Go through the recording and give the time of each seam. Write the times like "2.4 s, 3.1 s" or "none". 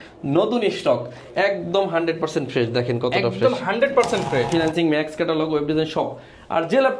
4.5 s